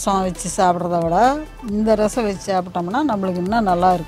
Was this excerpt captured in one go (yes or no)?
yes